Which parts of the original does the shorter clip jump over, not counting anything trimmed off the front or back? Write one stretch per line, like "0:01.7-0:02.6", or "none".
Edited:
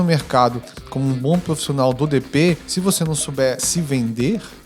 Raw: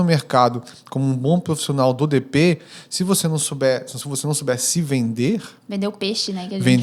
0:02.7-0:02.9
0:03.9-0:04.6